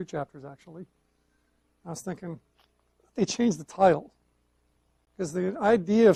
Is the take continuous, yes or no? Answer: yes